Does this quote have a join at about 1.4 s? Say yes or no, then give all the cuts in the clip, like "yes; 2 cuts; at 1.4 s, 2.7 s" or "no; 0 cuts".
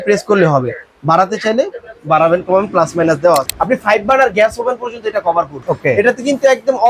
no; 2 cuts; at 3.5 s, 5.6 s